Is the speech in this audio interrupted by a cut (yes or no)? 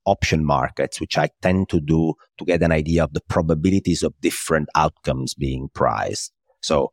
no